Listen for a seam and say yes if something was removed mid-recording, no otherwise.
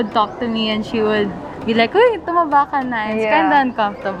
no